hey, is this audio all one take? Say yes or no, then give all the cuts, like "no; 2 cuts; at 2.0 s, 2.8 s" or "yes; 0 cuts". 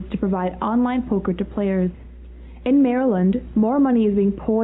no; 1 cut; at 3.6 s